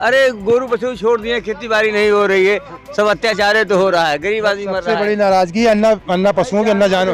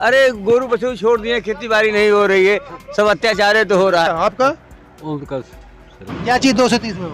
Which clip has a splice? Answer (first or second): second